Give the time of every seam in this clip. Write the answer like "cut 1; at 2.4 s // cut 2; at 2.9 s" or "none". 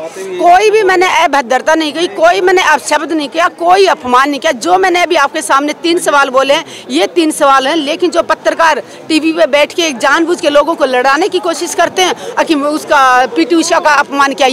none

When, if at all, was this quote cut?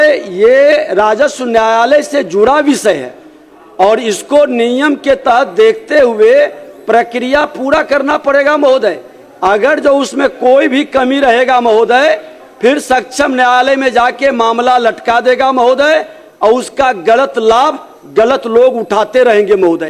none

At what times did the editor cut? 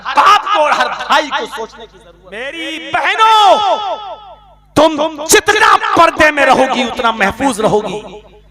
cut 1; at 2.6 s

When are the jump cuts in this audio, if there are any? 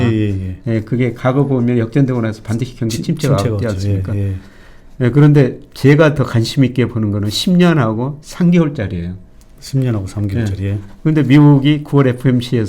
none

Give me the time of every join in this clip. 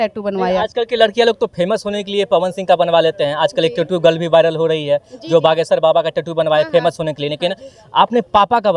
none

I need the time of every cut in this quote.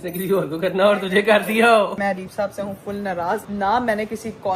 cut 1; at 2.0 s // cut 2; at 3.5 s

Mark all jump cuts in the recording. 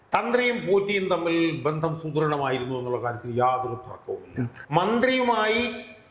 cut 1; at 4.6 s

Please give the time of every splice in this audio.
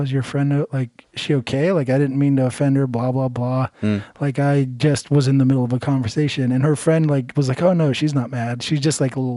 none

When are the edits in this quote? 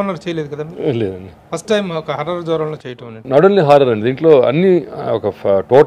cut 1; at 1.3 s // cut 2; at 2.8 s

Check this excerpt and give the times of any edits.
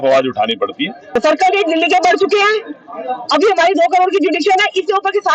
cut 1; at 1.2 s

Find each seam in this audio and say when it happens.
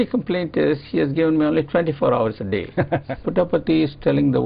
cut 1; at 3.1 s

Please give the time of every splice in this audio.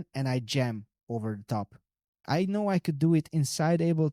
cut 1; at 2.1 s

